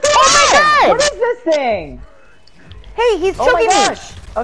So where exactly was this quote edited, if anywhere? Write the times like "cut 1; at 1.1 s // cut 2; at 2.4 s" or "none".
none